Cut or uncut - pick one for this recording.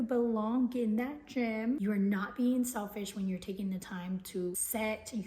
cut